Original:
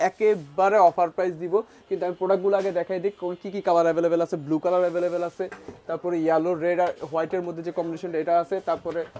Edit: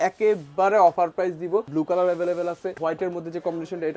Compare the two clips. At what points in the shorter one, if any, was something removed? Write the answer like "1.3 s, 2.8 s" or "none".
1.7 s, 2.8 s